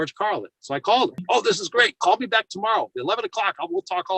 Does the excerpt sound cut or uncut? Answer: cut